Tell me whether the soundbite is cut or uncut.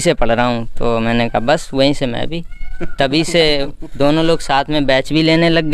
uncut